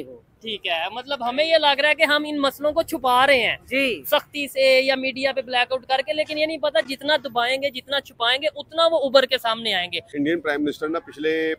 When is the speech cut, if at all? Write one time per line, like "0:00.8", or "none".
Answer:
0:10.0